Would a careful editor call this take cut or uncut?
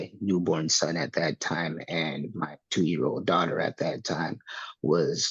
uncut